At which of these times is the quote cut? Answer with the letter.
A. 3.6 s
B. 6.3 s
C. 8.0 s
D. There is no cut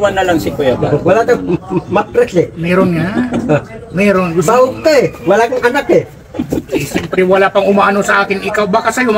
D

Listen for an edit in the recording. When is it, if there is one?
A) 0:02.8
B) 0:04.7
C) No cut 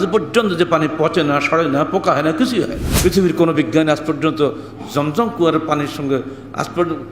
A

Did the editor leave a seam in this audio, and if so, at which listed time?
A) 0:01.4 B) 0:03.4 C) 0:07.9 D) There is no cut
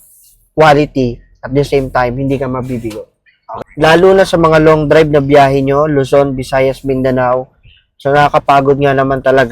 B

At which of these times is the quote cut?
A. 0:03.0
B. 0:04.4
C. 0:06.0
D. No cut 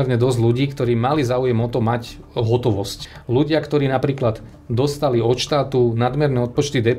A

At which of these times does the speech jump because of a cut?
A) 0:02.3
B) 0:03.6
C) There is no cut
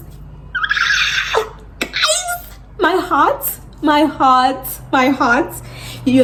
C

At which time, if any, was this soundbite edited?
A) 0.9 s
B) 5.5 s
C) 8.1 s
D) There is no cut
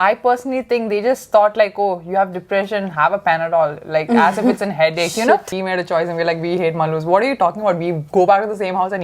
B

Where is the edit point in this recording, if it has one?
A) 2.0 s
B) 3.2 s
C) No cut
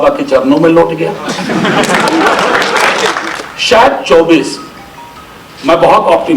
B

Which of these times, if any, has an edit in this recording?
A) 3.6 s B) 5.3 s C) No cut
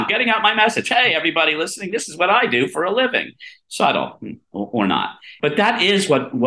B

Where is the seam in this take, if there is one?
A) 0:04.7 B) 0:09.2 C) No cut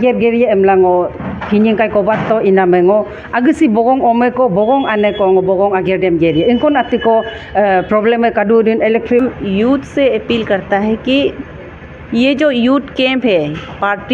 B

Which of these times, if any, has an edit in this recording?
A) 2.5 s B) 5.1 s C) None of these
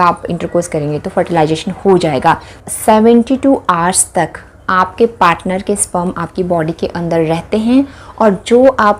A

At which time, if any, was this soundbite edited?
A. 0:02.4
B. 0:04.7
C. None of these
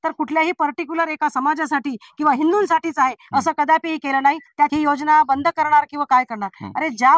B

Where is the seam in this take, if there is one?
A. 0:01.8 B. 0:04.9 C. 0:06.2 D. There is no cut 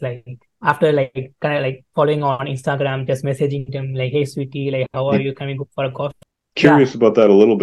C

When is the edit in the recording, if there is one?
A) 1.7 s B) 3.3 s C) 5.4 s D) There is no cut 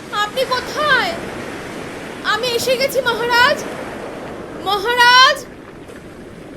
C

